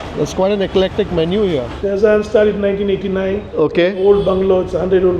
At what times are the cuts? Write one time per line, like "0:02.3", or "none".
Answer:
0:01.7